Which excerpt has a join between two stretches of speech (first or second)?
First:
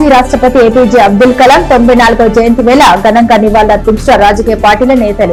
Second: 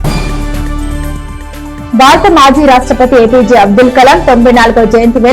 second